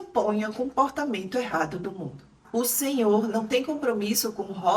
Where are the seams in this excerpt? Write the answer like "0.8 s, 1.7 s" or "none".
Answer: 2.3 s